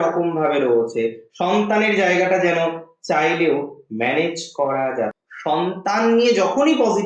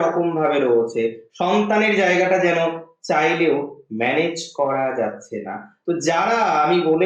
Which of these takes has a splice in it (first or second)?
first